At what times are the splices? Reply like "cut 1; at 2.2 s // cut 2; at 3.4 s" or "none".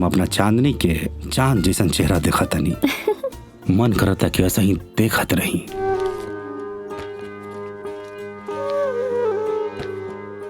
cut 1; at 5.8 s

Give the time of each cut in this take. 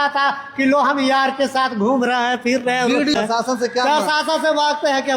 cut 1; at 3.1 s

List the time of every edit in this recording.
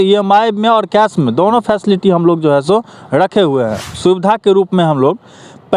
cut 1; at 3.9 s

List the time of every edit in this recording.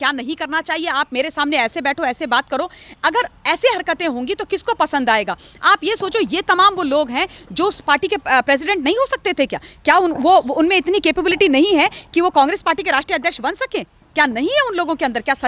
none

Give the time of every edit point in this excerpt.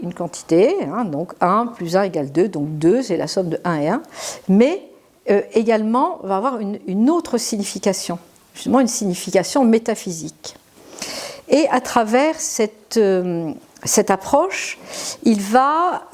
none

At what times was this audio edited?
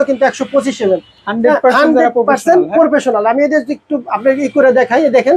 none

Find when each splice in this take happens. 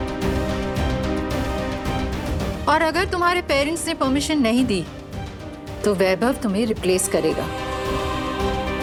none

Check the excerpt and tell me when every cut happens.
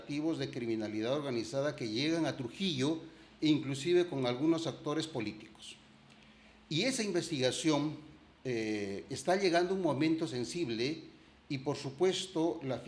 none

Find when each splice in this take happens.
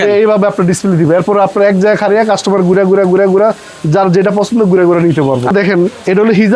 cut 1; at 5.5 s

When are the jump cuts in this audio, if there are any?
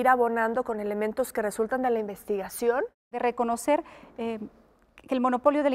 cut 1; at 3.1 s

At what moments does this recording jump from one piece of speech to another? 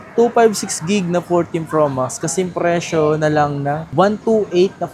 none

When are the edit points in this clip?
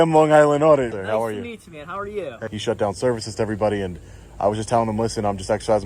cut 1; at 0.9 s // cut 2; at 2.5 s

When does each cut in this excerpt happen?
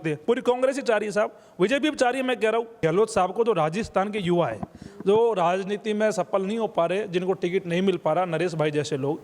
cut 1; at 2.7 s

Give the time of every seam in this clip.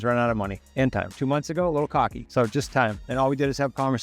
cut 1; at 1.1 s // cut 2; at 2.2 s // cut 3; at 3.0 s

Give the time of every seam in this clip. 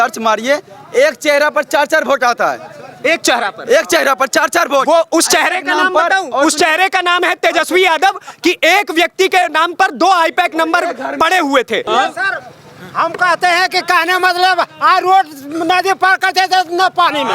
cut 1; at 11.8 s

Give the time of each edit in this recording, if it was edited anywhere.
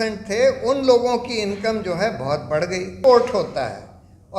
cut 1; at 2.9 s

